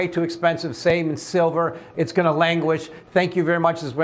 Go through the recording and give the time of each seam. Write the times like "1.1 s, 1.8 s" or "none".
1.8 s